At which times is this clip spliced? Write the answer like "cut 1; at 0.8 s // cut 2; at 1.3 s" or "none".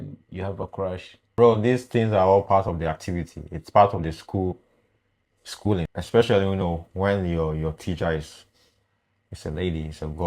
cut 1; at 1.2 s // cut 2; at 5.9 s